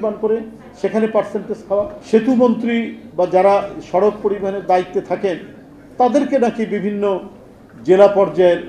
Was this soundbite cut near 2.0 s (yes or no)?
yes